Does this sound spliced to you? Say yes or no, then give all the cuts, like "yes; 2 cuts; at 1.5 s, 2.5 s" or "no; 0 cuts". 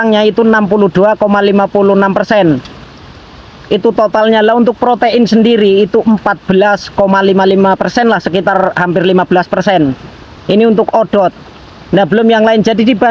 no; 0 cuts